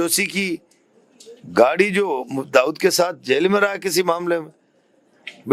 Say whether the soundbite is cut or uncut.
uncut